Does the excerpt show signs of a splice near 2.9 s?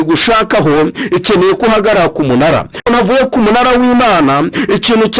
yes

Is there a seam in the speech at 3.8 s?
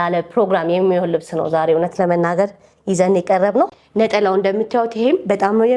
yes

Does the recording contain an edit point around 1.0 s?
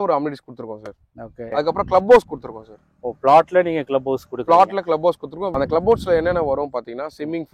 yes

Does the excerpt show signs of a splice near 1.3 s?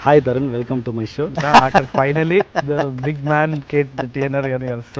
yes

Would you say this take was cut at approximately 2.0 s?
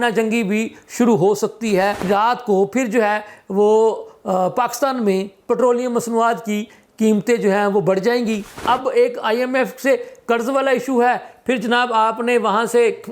yes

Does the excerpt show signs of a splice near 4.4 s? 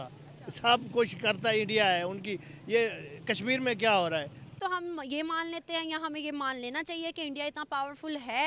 yes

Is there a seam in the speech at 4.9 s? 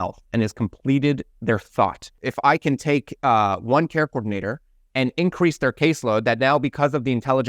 no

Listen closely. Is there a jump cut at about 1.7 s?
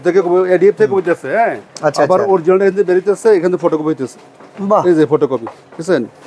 no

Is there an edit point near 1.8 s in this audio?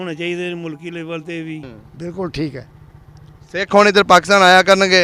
yes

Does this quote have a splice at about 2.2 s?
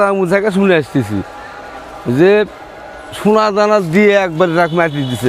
no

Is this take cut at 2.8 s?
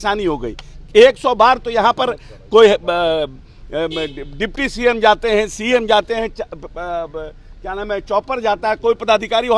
no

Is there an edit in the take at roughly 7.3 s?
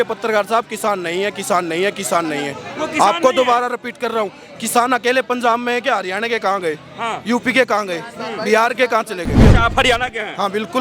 no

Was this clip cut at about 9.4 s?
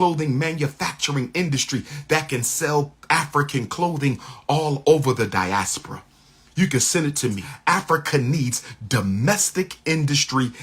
no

